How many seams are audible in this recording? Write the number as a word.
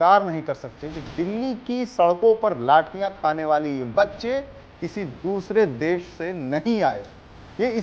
zero